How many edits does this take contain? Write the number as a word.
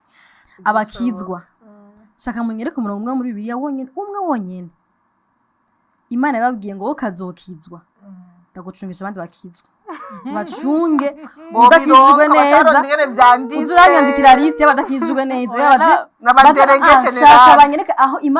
zero